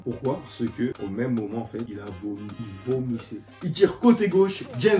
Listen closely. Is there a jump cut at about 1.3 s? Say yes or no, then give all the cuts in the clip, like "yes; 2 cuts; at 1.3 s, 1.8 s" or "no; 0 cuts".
no; 1 cut; at 3.5 s